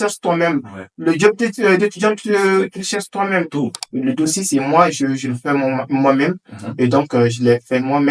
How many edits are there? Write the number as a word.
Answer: one